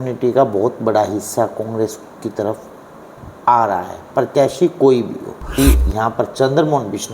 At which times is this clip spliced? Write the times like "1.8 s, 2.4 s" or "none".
5.6 s